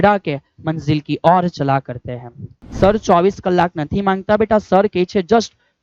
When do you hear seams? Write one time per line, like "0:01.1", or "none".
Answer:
0:02.6